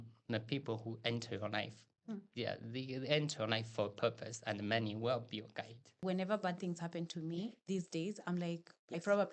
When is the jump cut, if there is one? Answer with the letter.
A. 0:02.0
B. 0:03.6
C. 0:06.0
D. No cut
C